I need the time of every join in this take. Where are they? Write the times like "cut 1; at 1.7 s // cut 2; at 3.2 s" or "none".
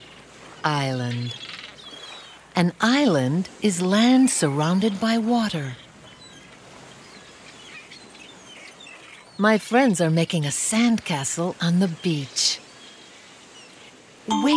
cut 1; at 10.1 s